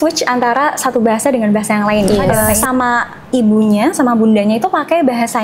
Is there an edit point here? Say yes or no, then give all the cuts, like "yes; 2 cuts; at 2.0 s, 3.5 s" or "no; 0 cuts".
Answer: yes; 1 cut; at 2.4 s